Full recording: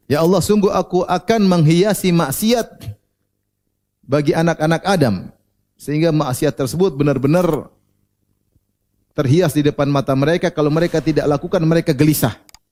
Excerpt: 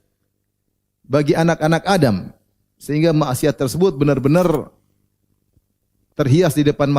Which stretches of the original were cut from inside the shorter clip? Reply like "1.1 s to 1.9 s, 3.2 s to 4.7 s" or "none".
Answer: none